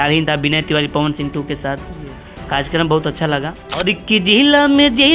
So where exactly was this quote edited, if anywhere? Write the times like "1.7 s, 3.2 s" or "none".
3.6 s